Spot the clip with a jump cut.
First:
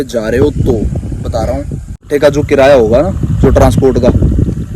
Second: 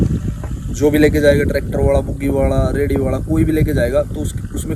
first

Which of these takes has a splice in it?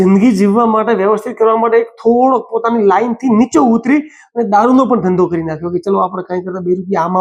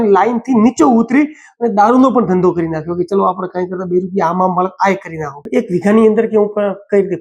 second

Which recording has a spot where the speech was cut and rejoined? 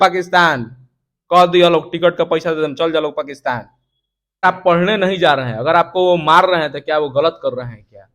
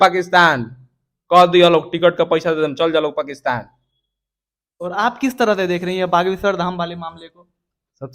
first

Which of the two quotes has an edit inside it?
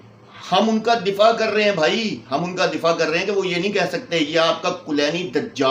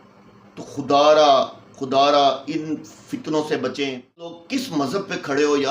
second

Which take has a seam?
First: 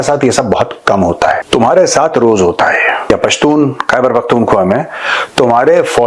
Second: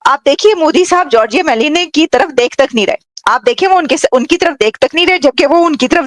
first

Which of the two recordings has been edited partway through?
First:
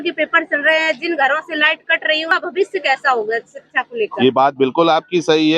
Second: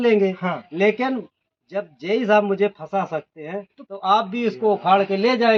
first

